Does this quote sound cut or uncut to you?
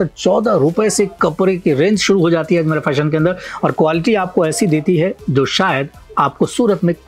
uncut